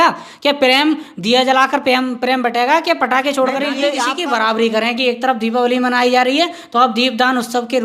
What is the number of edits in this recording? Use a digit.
1